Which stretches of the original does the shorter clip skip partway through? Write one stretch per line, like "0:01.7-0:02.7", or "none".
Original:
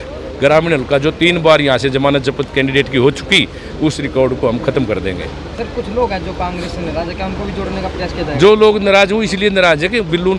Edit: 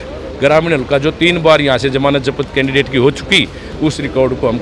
none